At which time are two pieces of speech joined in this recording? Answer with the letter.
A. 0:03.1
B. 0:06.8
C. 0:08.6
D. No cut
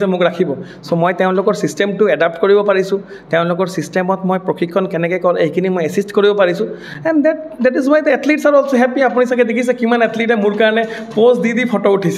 D